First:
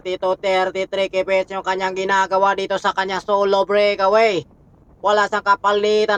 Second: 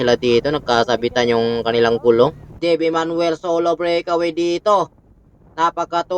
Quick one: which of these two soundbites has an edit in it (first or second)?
second